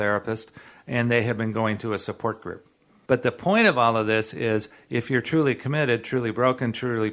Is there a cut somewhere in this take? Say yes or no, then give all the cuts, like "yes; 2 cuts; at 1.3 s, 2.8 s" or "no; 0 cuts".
yes; 1 cut; at 2.9 s